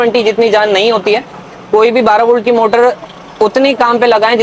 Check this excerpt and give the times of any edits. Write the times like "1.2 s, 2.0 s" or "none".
none